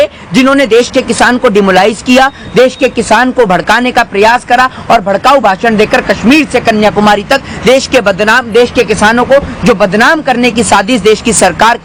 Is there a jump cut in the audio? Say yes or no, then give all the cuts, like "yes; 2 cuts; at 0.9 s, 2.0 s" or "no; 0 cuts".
no; 0 cuts